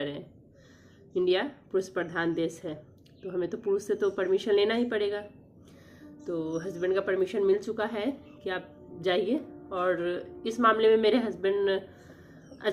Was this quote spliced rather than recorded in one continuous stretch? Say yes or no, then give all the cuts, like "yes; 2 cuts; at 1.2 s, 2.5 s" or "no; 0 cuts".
no; 0 cuts